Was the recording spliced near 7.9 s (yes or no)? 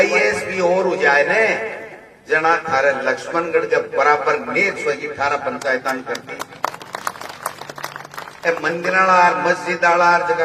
no